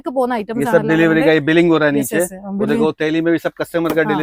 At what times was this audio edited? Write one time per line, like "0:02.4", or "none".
none